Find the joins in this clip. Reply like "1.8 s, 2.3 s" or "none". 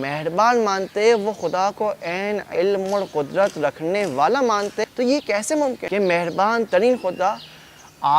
4.8 s, 5.8 s

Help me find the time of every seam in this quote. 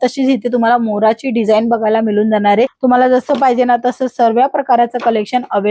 2.7 s

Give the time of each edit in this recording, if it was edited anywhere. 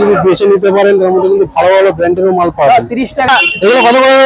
3.3 s

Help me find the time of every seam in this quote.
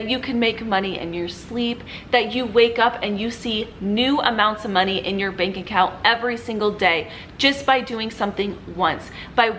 none

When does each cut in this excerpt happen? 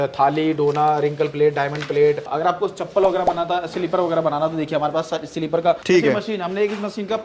2.3 s, 5.8 s

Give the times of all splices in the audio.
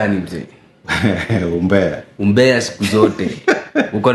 none

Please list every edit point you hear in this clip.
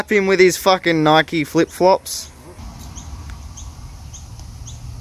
2.6 s

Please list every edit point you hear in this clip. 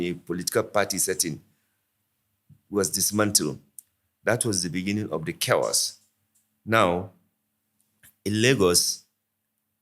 none

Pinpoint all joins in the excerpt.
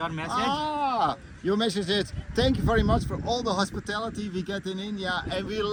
none

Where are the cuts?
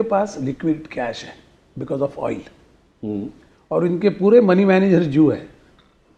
none

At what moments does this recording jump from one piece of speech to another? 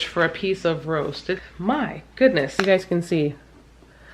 1.4 s, 2.5 s

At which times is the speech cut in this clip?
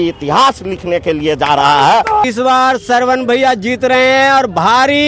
2.3 s

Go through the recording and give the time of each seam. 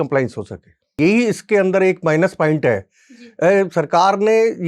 1.0 s

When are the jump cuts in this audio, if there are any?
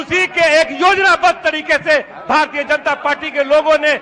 none

